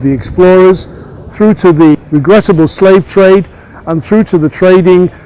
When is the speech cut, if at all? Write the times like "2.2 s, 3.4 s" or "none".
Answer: 2.0 s